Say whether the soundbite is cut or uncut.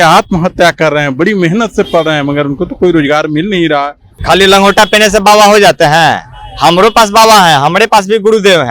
cut